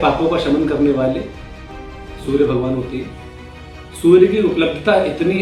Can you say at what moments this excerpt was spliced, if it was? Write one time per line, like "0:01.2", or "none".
none